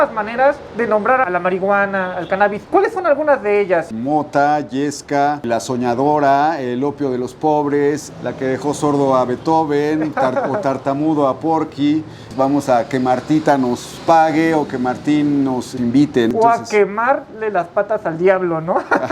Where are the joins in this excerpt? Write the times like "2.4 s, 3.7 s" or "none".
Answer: 8.1 s, 12.2 s, 16.3 s